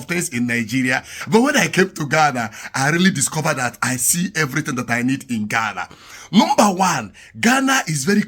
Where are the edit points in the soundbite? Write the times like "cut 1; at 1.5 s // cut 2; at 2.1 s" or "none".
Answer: cut 1; at 1.1 s